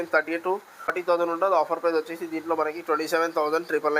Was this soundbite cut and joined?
yes; 1 cut; at 1.0 s

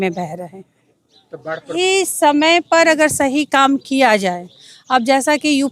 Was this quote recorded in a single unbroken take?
no; 1 cut; at 1.7 s

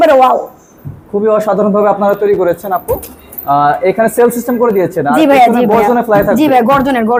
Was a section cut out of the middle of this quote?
no; 0 cuts

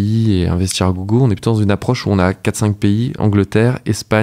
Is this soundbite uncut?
no; 1 cut; at 3.2 s

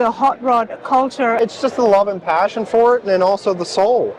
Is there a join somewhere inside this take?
yes; 1 cut; at 1.4 s

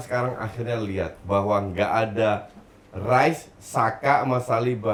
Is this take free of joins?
yes; 0 cuts

